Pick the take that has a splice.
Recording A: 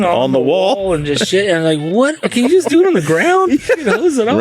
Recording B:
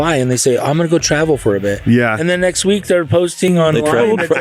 A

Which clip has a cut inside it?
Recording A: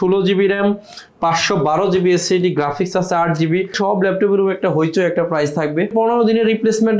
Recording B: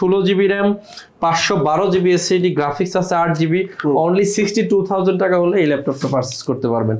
A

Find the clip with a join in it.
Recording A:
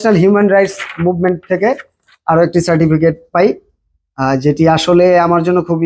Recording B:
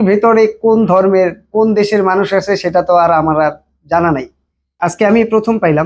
B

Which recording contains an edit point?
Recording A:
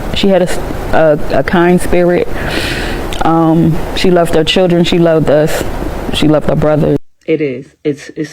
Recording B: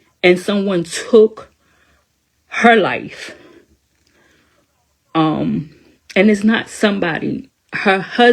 A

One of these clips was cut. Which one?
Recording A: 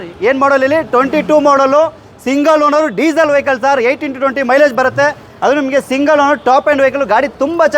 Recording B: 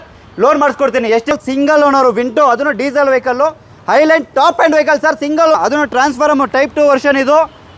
B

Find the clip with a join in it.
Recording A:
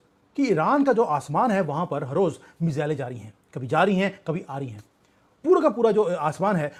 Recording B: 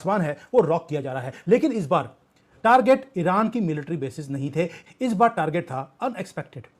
B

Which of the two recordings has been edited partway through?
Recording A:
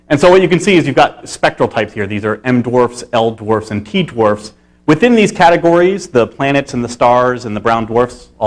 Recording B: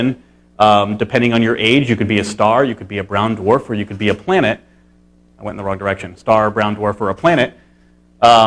A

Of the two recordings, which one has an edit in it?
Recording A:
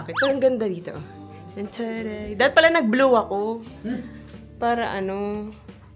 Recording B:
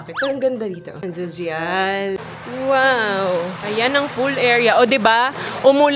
B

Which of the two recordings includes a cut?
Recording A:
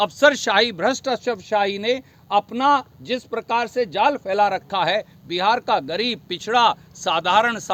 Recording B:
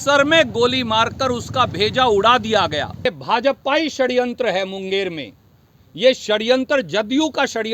B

